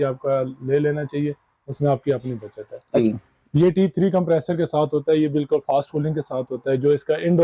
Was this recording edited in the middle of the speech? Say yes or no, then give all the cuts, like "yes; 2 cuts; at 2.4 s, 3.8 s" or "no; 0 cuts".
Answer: yes; 1 cut; at 2.5 s